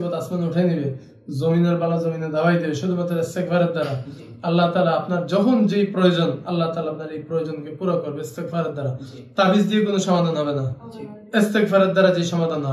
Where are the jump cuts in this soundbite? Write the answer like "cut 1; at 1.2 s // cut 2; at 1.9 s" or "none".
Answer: none